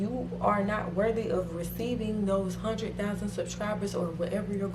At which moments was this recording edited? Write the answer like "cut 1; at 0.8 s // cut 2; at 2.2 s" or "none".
none

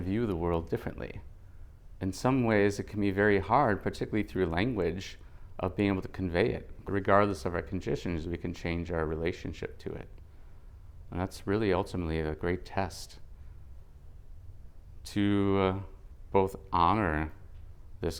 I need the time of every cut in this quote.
cut 1; at 6.7 s

